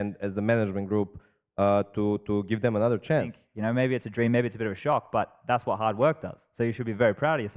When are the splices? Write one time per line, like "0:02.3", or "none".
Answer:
0:03.4